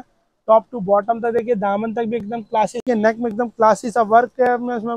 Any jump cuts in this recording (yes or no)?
yes